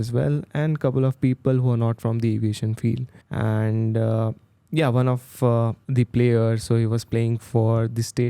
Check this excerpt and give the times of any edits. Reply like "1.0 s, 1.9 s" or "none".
3.2 s, 5.8 s